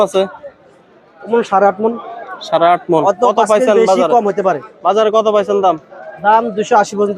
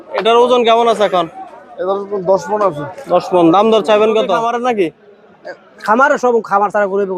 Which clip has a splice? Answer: second; 1 cut; at 4.4 s

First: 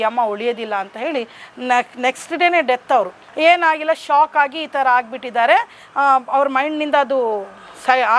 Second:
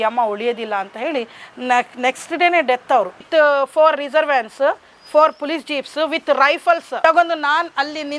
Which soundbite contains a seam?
second; 2 cuts; at 3.2 s, 6.9 s

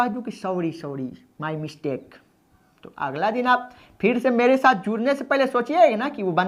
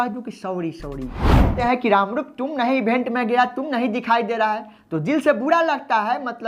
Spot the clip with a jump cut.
second; 1 cut; at 1.5 s

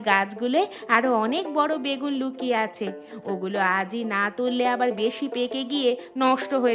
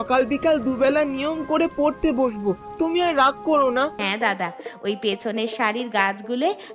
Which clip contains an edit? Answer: second; 1 cut; at 4.0 s

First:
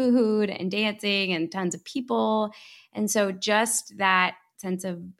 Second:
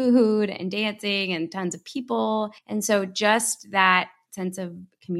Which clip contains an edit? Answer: second; 1 cut; at 2.6 s

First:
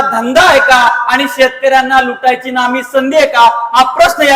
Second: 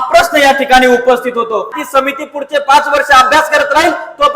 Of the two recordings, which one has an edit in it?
second; 1 cut; at 1.8 s

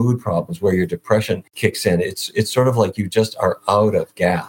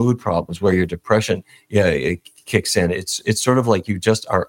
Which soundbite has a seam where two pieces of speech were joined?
first; 1 cut; at 1.5 s

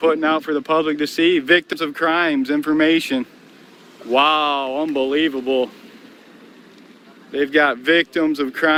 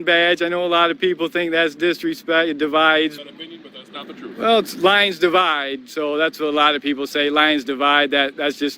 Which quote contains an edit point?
second; 1 cut; at 3.2 s

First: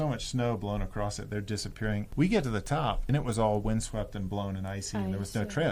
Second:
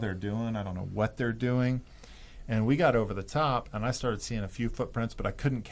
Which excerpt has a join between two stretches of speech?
first; 2 cuts; at 2.1 s, 3.0 s

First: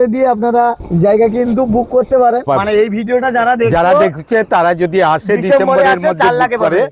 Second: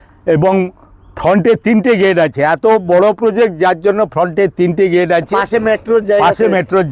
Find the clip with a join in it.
first; 2 cuts; at 0.8 s, 2.4 s

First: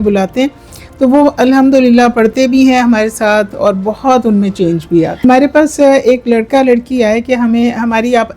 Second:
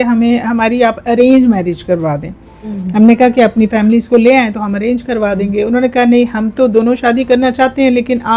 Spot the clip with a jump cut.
first; 1 cut; at 5.2 s

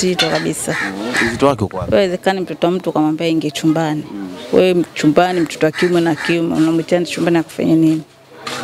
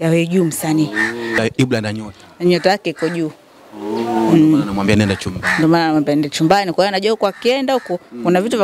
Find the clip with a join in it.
second; 1 cut; at 1.4 s

